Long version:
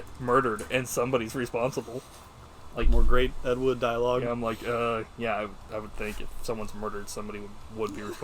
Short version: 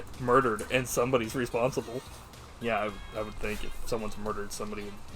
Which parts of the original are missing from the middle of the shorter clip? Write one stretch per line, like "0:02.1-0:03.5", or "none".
0:02.5-0:05.1